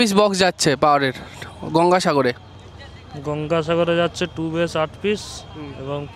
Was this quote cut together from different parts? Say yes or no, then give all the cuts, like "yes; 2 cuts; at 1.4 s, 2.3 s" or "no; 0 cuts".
no; 0 cuts